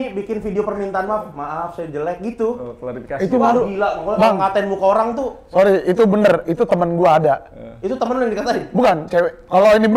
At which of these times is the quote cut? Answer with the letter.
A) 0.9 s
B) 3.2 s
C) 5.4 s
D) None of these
D